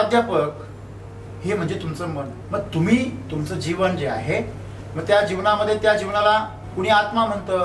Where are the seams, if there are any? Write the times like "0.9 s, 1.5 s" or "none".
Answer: 2.4 s, 6.6 s